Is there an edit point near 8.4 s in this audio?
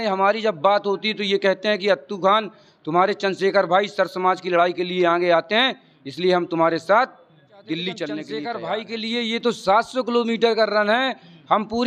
yes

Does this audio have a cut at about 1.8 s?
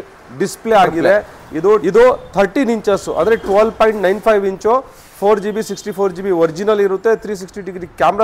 yes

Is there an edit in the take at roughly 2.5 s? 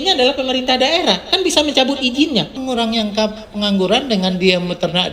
yes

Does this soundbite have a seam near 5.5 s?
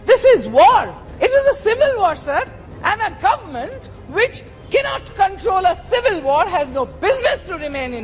no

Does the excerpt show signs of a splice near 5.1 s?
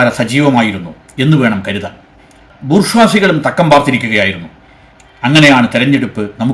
no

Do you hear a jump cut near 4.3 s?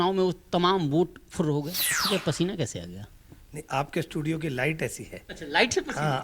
no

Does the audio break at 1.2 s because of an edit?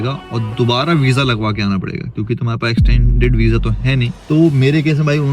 no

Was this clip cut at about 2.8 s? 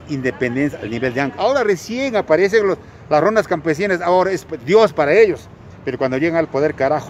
no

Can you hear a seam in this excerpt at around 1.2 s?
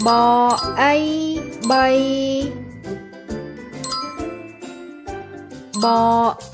no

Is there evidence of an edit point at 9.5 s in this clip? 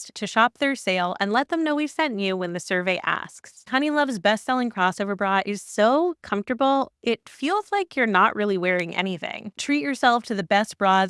yes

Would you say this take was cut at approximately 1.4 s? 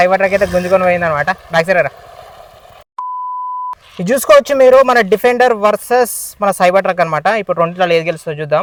no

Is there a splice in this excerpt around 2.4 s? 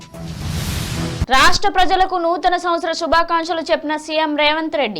no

